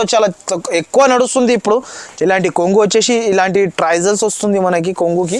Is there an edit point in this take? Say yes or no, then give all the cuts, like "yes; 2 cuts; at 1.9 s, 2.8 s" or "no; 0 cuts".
yes; 1 cut; at 2.0 s